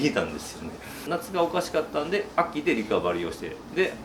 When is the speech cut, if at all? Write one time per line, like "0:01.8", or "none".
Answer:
0:01.0